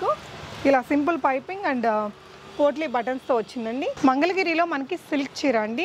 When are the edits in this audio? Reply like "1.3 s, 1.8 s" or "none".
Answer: 3.9 s